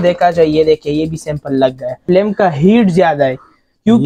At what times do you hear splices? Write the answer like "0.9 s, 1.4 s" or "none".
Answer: 2.0 s